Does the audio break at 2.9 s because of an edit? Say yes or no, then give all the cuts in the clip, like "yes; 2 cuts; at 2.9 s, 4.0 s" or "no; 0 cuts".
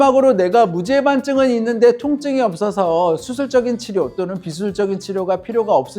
no; 0 cuts